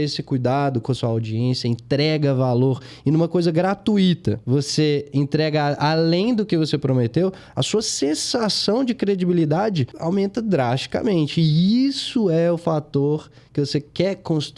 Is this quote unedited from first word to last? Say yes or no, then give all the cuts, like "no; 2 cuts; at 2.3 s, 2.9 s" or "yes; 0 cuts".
no; 2 cuts; at 4.4 s, 9.9 s